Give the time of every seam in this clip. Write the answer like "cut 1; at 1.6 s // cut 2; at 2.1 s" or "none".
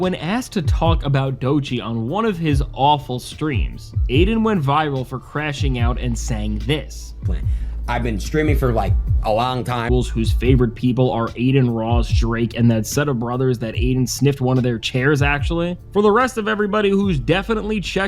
cut 1; at 9.9 s